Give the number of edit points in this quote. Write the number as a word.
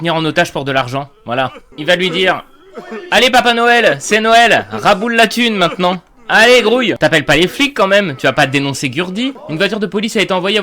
one